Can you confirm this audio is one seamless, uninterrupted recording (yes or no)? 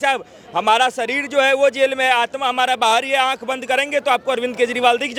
yes